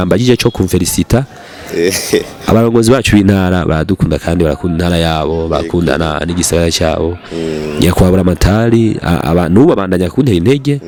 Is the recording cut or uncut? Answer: uncut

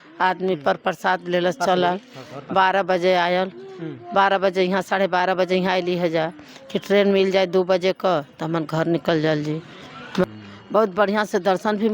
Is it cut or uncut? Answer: cut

